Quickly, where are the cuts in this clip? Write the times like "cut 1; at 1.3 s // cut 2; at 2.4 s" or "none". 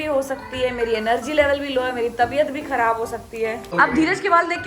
cut 1; at 3.7 s